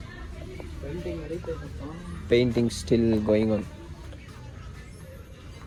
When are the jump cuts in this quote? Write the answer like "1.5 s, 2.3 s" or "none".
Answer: none